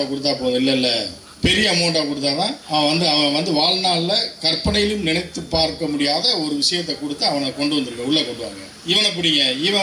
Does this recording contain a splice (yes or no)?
yes